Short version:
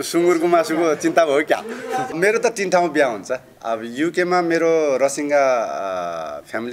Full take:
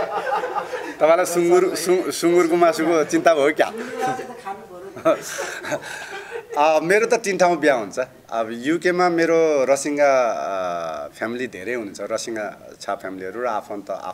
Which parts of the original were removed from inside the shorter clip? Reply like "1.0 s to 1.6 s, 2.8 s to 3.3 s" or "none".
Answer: 4.3 s to 6.8 s